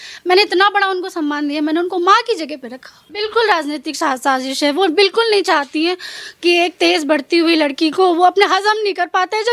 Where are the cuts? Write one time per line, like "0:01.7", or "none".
0:03.1